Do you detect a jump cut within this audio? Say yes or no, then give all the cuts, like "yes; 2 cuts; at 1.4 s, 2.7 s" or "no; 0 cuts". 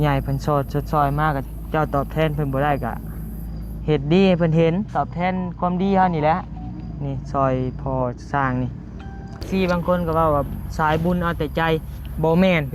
yes; 1 cut; at 9.4 s